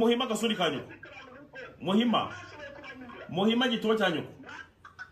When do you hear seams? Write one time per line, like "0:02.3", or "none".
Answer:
none